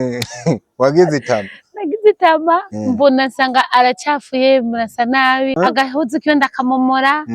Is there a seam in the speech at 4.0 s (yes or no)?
no